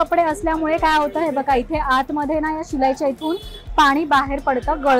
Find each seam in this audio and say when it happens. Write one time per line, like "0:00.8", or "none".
none